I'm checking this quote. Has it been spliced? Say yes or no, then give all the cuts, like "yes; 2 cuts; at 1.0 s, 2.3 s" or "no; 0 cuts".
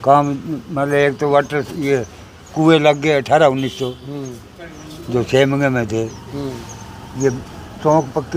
no; 0 cuts